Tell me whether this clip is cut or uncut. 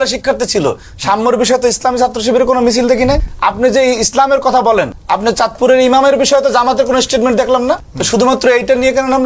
cut